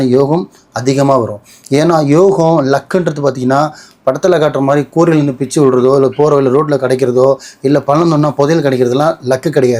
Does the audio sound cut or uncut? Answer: uncut